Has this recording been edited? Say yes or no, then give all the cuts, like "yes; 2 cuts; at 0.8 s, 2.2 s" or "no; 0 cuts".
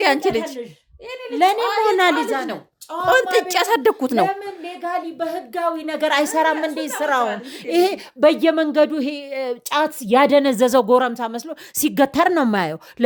no; 0 cuts